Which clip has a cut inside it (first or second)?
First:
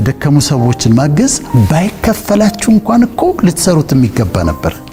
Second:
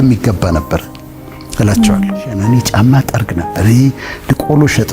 second